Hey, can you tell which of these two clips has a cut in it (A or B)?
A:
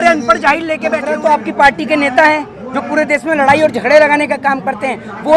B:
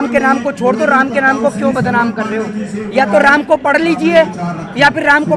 A